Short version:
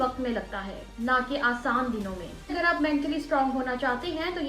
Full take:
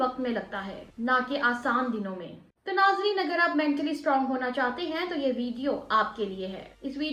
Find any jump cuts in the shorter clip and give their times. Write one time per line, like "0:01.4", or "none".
0:02.5